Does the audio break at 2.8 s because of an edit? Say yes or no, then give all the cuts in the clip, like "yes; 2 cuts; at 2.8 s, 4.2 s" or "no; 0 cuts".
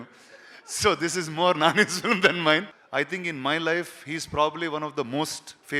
yes; 1 cut; at 2.8 s